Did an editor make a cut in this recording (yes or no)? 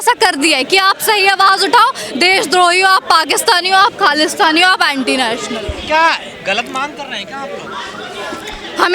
no